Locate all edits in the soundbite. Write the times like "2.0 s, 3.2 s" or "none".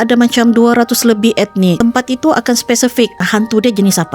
1.8 s, 3.2 s

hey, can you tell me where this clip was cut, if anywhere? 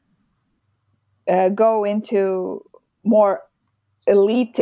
none

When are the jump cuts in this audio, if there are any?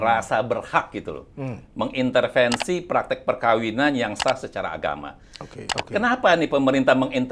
5.6 s

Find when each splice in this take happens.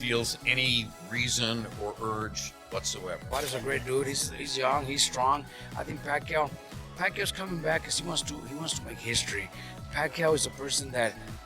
3.3 s

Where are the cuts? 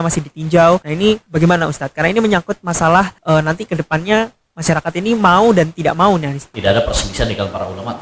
1.2 s, 3.2 s, 4.5 s, 6.5 s

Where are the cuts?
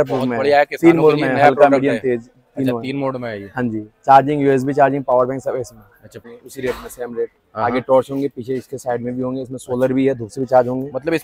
6.3 s

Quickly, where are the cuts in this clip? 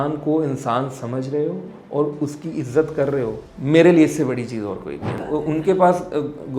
3.5 s, 5.2 s

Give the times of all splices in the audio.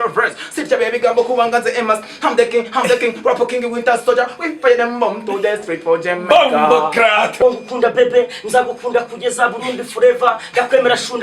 7.3 s

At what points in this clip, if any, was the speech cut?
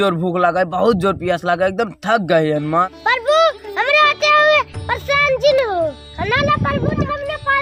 none

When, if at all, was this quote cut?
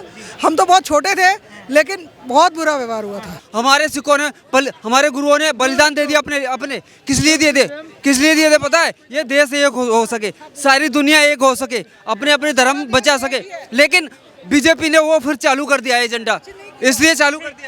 3.4 s

